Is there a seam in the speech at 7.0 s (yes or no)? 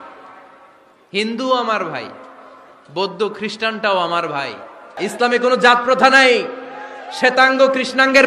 no